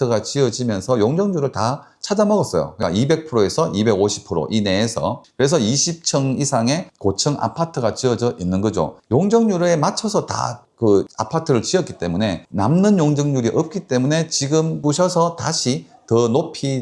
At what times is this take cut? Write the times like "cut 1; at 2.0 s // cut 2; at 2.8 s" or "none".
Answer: none